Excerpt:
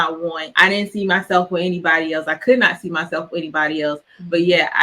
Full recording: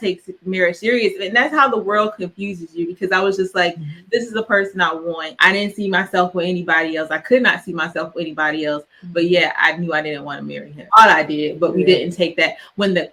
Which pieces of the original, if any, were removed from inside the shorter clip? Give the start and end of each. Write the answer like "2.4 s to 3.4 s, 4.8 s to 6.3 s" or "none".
none